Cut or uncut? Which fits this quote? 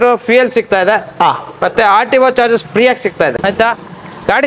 cut